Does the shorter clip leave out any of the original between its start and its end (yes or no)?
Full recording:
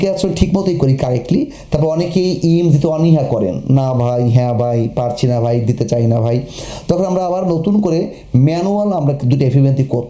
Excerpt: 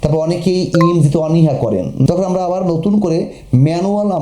yes